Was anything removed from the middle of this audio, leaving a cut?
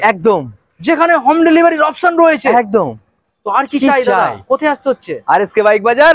no; 0 cuts

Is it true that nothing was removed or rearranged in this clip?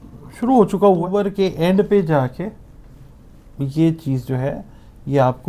no; 1 cut; at 1.1 s

